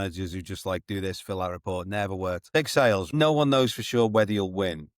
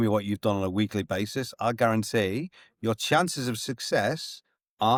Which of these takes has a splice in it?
first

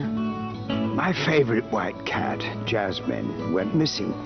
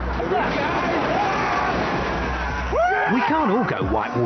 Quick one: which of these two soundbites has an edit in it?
first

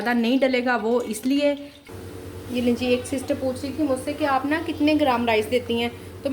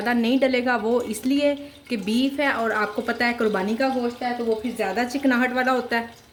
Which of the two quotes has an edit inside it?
first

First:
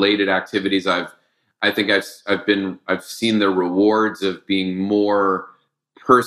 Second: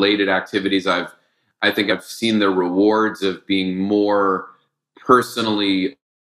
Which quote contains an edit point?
second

